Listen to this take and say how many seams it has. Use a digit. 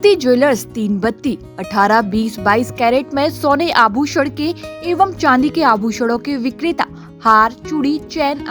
0